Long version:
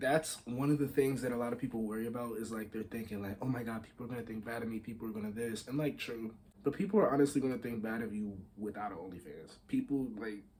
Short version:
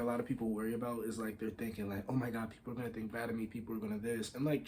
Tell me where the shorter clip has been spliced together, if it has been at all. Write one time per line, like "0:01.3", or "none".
none